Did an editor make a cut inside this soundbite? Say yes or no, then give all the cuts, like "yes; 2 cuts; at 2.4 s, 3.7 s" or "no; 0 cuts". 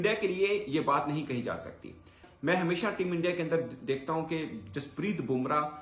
yes; 1 cut; at 2.2 s